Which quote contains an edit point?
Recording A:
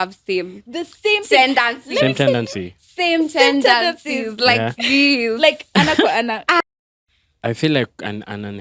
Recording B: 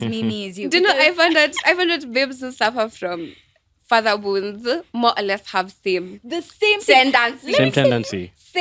A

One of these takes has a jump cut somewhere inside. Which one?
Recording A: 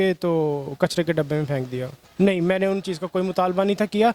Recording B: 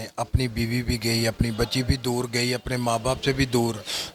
A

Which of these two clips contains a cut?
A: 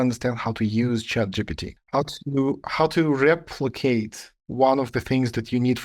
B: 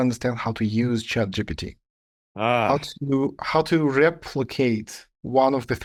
A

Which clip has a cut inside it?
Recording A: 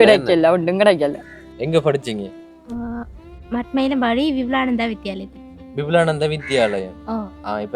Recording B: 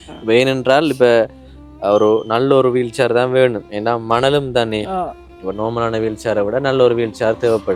A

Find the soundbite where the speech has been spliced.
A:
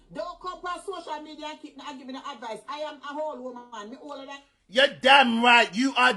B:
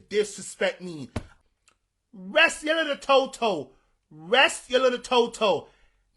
B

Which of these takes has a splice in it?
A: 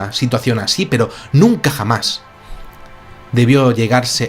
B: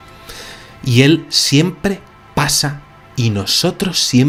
A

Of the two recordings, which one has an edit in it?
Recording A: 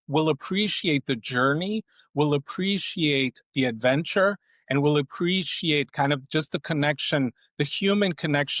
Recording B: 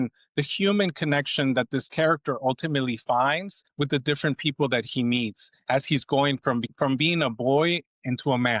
B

